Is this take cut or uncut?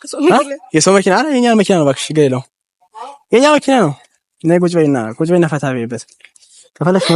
uncut